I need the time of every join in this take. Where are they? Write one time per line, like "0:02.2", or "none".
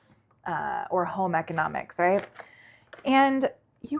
none